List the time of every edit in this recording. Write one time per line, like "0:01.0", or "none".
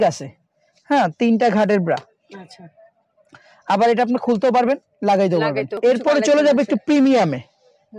0:05.7